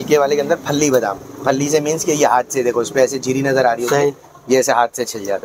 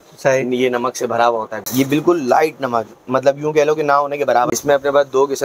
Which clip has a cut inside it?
second; 2 cuts; at 1.6 s, 4.5 s

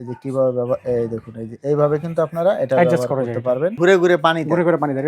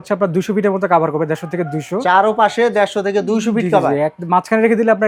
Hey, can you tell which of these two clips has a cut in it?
first; 1 cut; at 3.8 s

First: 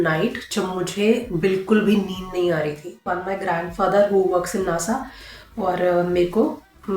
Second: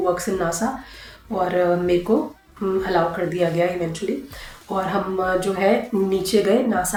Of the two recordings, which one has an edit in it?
first; 1 cut; at 3.1 s

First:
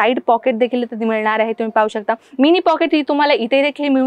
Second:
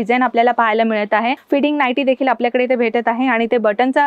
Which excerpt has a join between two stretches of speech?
second; 1 cut; at 1.4 s

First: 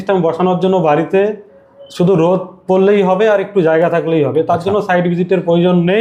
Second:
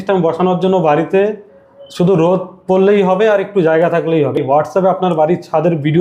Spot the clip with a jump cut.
second; 1 cut; at 4.4 s

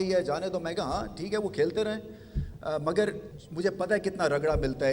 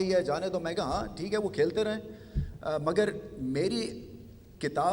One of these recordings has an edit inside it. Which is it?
first; 1 cut; at 3.3 s

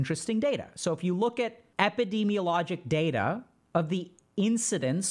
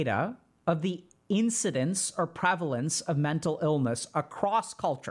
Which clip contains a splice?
first; 1 cut; at 1.6 s

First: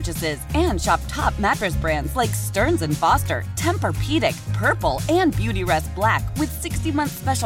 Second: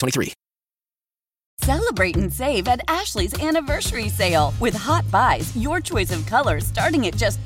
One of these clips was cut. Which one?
second; 1 cut; at 1.5 s

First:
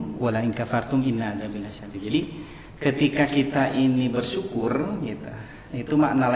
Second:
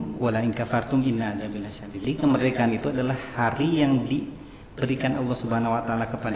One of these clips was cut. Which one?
second; 1 cut; at 2.0 s

